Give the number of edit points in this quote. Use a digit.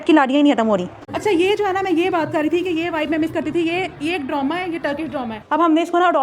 2